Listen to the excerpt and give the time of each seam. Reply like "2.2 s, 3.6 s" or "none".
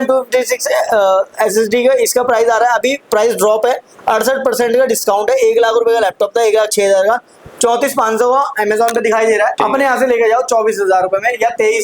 9.5 s